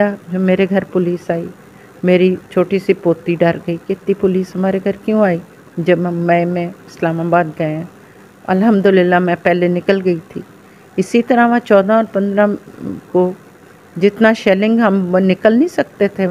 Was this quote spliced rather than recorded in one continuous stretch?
no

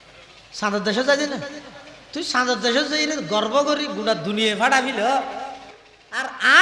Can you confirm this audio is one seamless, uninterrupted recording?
no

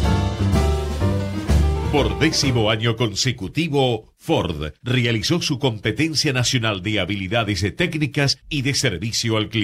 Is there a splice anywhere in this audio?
yes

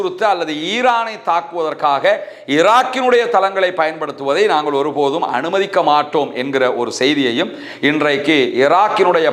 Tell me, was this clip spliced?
no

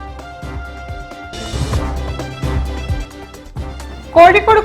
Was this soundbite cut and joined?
no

